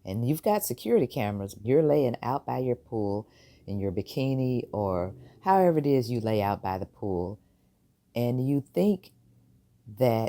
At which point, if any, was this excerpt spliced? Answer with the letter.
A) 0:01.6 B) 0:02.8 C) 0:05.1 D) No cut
A